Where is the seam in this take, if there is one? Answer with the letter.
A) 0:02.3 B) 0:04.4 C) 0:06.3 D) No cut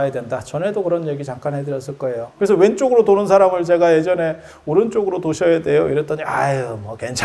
A